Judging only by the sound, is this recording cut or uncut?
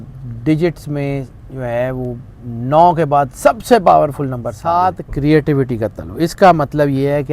cut